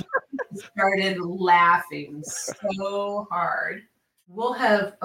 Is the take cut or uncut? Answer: cut